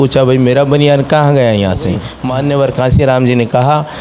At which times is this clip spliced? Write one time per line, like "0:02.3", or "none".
0:02.1

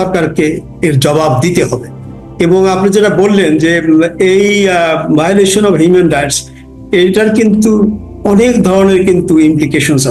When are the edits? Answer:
none

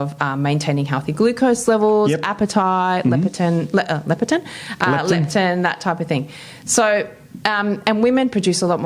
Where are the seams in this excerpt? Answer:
none

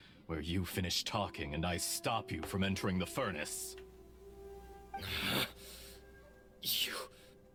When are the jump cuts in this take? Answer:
none

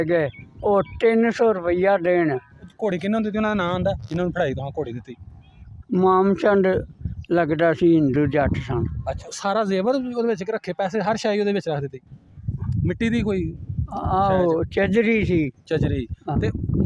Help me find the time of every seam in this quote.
0:02.7
0:09.3

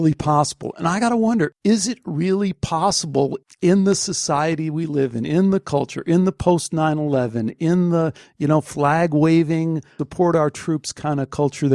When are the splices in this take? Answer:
0:01.5

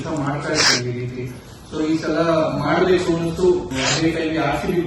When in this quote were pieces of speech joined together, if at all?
0:03.7

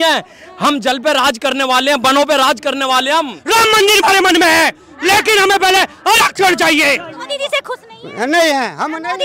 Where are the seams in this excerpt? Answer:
0:03.4
0:07.1

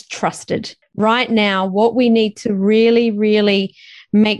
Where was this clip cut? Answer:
0:00.9

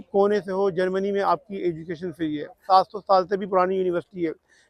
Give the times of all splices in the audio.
0:02.5

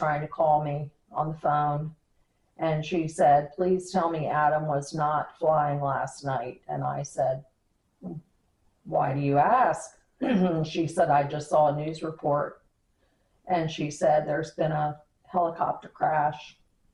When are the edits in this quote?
none

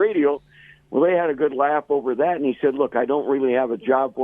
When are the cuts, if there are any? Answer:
none

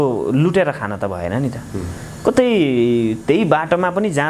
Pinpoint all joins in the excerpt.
none

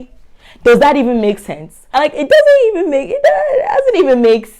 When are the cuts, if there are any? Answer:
0:01.9

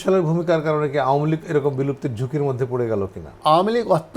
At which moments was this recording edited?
0:03.2

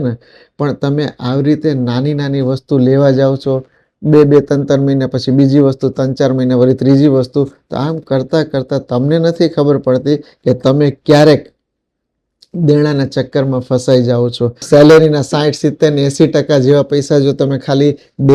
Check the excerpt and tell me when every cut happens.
0:14.6

